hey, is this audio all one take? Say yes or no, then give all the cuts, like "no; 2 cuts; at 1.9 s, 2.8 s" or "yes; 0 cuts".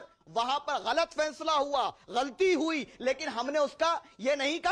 yes; 0 cuts